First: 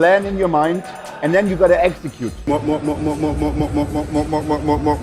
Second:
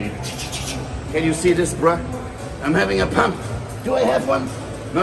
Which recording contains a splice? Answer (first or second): first